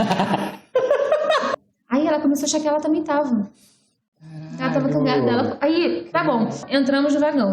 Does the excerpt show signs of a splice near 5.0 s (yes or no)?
no